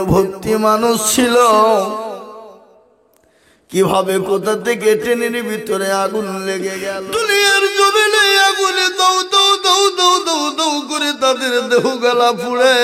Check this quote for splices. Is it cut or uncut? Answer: cut